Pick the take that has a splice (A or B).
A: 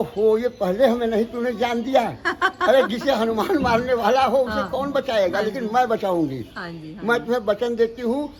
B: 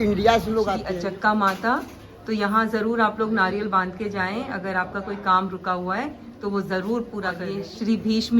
B